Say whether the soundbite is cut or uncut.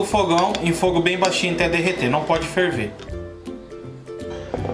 uncut